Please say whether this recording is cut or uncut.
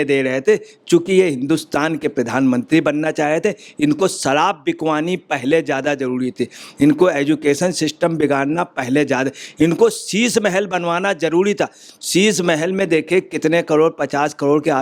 uncut